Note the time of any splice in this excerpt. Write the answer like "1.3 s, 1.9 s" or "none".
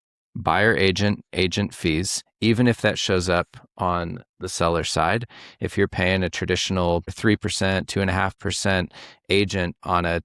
7.1 s